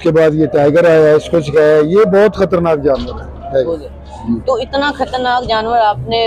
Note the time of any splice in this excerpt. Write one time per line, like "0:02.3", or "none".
none